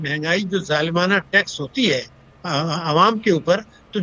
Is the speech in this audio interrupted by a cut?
no; 0 cuts

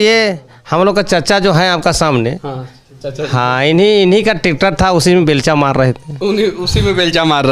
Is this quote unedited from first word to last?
yes; 0 cuts

